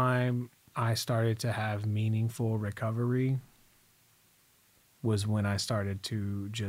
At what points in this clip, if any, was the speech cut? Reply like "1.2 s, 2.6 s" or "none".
none